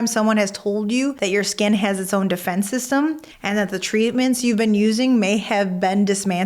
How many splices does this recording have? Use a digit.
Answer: 1